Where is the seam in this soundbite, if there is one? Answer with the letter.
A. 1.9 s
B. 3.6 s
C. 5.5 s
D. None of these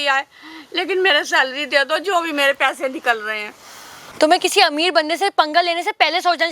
B